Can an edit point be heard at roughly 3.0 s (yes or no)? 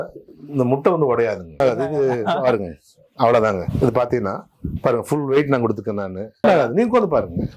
no